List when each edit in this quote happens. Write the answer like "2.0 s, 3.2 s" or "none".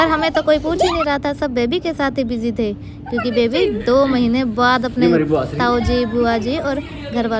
none